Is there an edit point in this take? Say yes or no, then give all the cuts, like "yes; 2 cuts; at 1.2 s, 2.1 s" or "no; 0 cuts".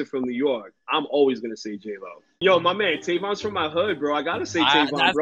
yes; 1 cut; at 2.4 s